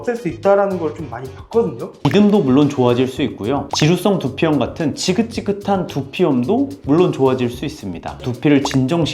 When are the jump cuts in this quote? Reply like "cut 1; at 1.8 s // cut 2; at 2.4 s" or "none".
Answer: cut 1; at 1.9 s // cut 2; at 8.2 s